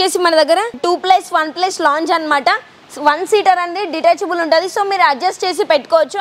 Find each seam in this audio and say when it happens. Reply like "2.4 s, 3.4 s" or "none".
none